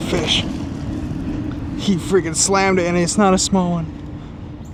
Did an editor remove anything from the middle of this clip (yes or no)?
no